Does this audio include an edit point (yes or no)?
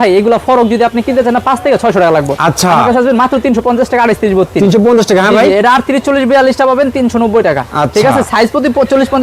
no